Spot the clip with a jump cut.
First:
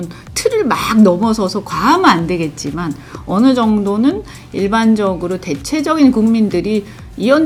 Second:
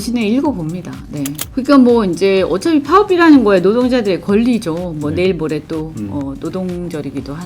second; 1 cut; at 1.4 s

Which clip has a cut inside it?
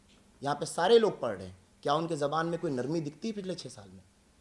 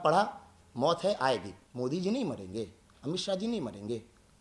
second; 1 cut; at 1.6 s

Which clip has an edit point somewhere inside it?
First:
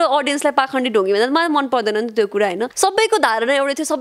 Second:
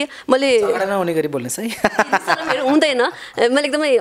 first; 1 cut; at 2.7 s

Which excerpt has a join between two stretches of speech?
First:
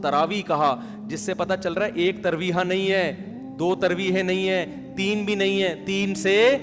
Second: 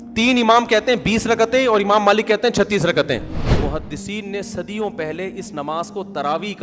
second; 1 cut; at 3.4 s

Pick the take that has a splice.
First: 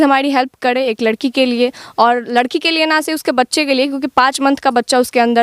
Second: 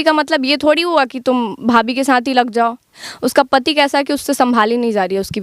second; 1 cut; at 3.0 s

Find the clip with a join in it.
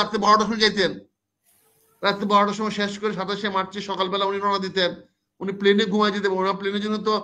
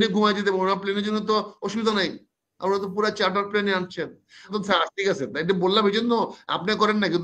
second; 1 cut; at 4.5 s

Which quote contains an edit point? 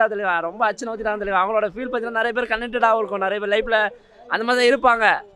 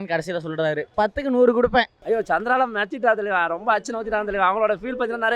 second; 2 cuts; at 0.8 s, 1.9 s

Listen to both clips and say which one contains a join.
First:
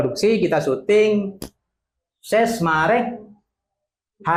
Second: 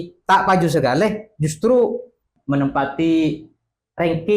second; 1 cut; at 2.3 s

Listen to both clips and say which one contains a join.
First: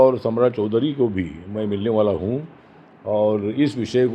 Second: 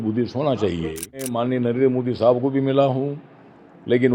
second; 1 cut; at 1.3 s

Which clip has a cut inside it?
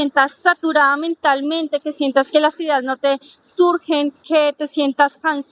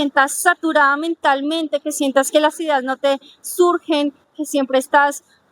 second; 1 cut; at 4.2 s

